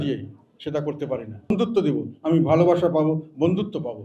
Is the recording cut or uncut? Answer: cut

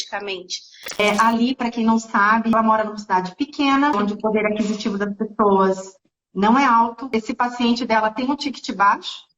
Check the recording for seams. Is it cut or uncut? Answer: cut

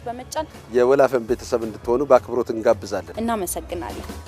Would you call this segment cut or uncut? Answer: cut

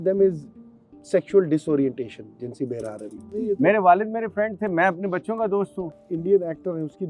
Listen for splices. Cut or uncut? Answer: cut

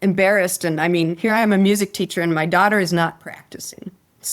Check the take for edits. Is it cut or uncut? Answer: uncut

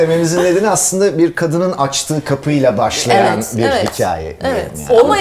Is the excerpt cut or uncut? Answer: uncut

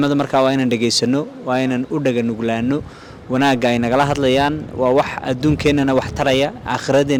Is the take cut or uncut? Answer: uncut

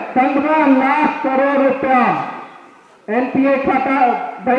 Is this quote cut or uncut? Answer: uncut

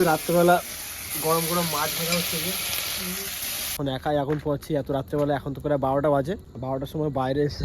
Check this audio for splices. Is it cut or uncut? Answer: cut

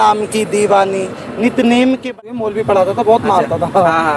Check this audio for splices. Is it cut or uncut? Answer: cut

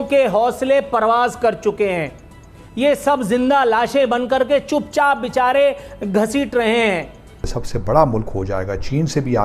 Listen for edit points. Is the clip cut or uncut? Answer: cut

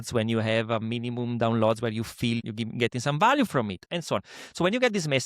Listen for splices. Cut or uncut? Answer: cut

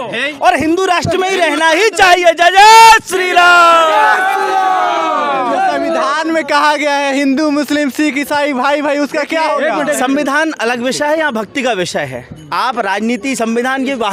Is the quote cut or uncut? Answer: uncut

